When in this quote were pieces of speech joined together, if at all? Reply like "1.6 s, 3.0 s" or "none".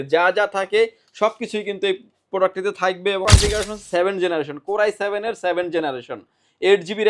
3.2 s